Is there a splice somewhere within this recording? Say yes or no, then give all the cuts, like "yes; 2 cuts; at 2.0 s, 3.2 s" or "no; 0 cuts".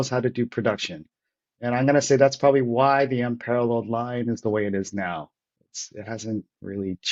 no; 0 cuts